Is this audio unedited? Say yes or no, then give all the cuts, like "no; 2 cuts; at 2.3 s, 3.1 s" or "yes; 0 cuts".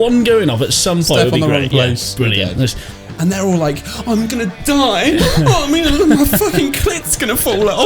no; 1 cut; at 2.8 s